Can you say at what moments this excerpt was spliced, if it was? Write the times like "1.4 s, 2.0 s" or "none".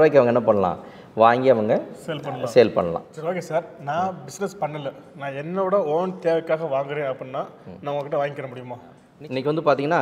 3.1 s, 9.0 s